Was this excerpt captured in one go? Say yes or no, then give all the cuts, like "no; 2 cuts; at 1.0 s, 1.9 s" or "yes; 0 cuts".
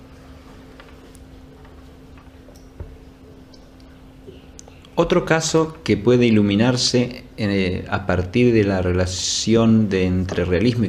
yes; 0 cuts